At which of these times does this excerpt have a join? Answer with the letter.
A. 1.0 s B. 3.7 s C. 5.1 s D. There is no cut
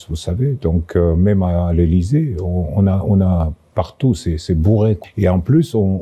C